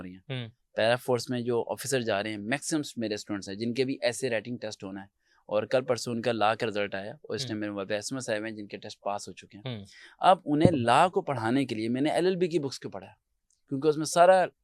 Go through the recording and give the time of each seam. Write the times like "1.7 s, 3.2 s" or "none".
none